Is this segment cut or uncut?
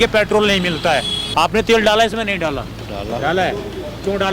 cut